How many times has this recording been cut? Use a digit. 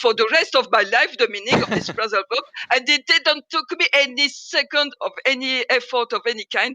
1